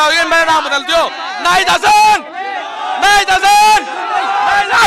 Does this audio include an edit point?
no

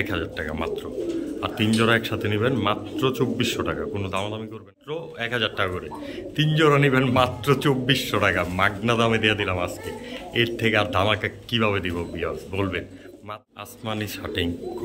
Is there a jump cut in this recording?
yes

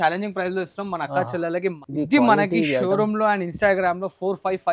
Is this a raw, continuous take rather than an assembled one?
no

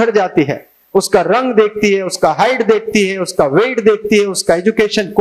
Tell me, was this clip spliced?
no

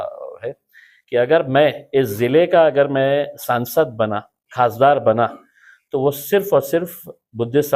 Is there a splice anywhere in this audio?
no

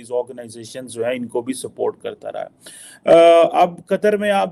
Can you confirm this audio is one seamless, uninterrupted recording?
yes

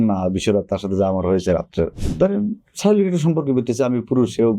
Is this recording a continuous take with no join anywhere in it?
no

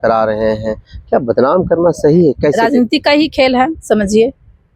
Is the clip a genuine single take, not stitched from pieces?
no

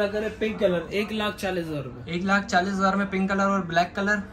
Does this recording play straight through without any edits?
yes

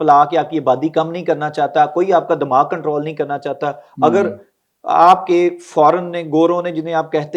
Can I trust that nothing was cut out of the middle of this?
yes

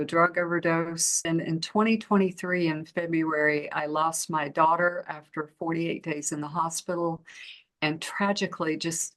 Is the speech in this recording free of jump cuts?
no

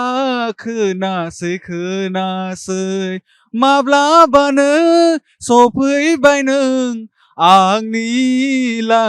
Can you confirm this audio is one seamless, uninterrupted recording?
yes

